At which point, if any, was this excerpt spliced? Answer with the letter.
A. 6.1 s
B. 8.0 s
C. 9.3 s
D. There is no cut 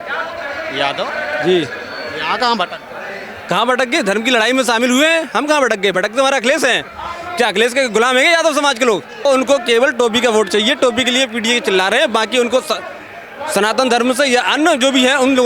C